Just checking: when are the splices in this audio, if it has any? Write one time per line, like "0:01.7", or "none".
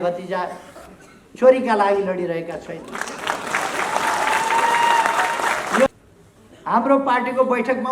0:05.9